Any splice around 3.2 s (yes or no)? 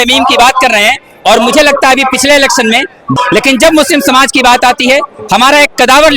yes